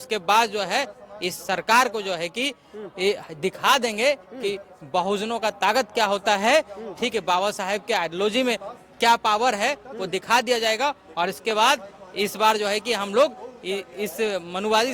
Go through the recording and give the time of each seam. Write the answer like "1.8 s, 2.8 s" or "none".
none